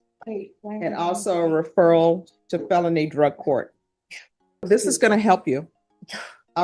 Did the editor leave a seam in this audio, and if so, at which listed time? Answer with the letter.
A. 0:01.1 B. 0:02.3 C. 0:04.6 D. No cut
C